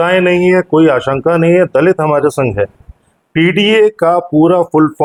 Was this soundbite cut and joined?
no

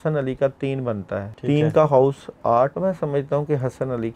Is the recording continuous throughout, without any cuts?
no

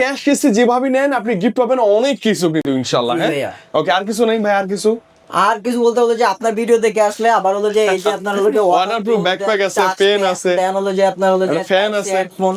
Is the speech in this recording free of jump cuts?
yes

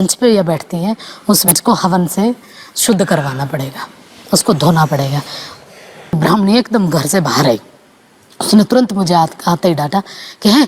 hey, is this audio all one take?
no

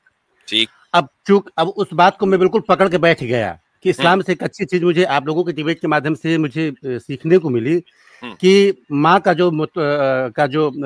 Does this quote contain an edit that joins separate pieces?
no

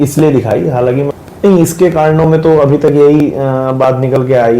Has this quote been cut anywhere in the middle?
yes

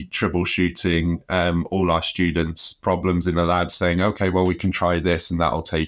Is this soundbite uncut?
yes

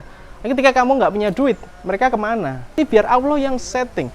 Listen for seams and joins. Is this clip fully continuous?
no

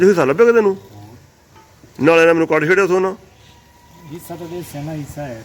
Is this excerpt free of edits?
yes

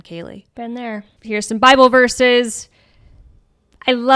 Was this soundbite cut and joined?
yes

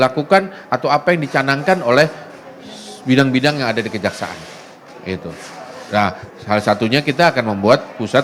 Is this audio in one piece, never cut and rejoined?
yes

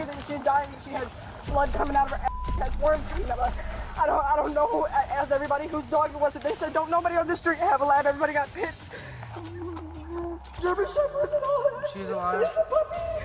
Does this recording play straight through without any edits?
yes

